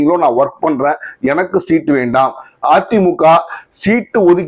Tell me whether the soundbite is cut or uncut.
uncut